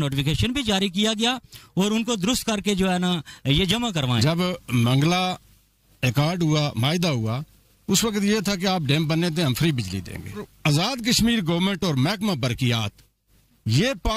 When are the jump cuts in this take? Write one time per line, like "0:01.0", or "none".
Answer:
0:04.2
0:10.5